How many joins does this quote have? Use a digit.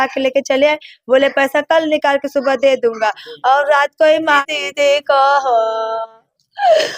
1